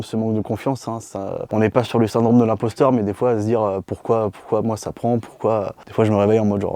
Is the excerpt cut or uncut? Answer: uncut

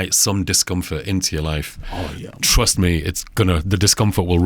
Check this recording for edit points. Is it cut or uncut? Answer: uncut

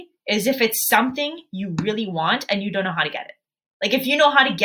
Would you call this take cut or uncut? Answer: uncut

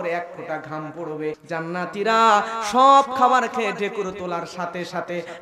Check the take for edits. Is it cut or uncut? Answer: cut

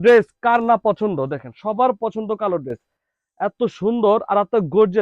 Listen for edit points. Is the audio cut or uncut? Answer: uncut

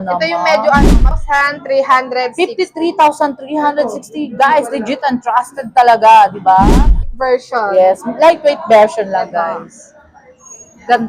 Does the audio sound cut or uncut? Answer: cut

